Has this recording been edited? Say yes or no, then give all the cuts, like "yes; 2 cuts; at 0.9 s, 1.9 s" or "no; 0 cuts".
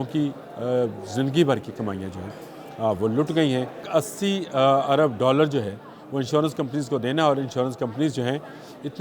yes; 1 cut; at 3.8 s